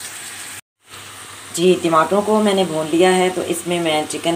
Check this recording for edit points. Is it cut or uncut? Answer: uncut